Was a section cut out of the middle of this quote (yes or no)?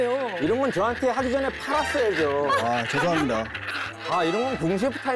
no